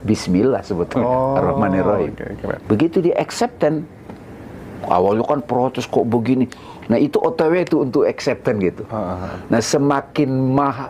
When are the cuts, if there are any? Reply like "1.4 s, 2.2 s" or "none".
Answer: 2.5 s